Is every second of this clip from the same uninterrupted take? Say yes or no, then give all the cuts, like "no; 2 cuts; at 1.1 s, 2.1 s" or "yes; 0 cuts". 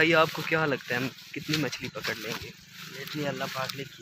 yes; 0 cuts